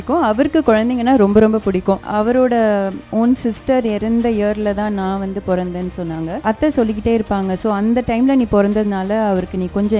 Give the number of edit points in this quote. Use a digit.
2